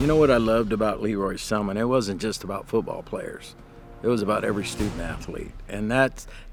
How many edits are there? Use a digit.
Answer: 0